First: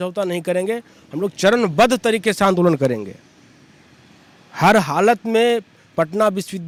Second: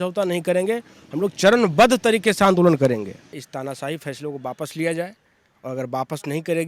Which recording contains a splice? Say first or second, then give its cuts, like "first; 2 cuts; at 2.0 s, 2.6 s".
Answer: second; 1 cut; at 3.4 s